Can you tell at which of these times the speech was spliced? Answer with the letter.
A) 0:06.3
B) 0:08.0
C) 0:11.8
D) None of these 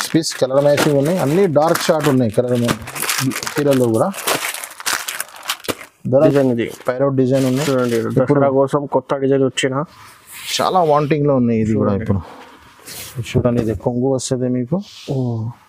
A